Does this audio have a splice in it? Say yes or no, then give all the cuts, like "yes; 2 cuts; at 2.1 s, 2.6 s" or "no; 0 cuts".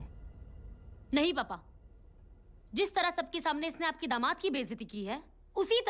no; 0 cuts